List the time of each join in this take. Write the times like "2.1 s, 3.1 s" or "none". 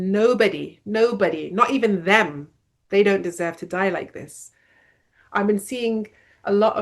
none